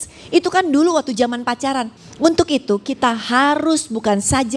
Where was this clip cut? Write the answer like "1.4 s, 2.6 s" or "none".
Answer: 1.9 s